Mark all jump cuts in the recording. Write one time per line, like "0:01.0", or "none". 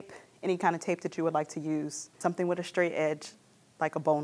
0:02.2